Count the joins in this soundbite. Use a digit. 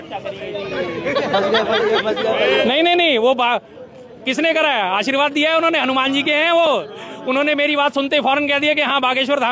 1